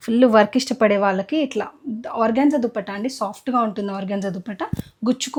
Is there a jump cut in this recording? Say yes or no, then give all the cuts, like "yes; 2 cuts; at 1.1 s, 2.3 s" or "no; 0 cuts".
no; 0 cuts